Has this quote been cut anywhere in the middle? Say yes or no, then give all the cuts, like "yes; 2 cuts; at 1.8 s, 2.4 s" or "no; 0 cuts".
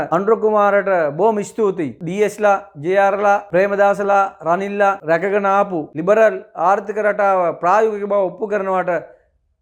no; 0 cuts